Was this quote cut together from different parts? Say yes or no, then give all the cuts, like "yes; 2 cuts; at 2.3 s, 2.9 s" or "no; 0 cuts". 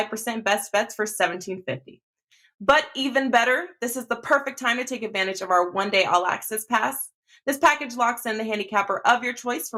no; 0 cuts